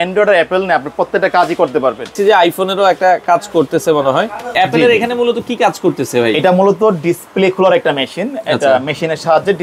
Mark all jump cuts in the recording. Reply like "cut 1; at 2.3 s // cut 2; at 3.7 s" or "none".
cut 1; at 2.2 s // cut 2; at 4.5 s